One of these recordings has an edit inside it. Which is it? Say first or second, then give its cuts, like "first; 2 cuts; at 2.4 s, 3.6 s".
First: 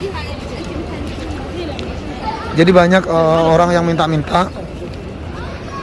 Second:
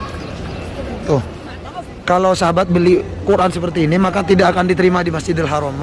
second; 1 cut; at 1.5 s